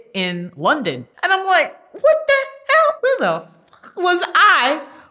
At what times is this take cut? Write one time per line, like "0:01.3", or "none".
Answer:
0:01.1
0:03.0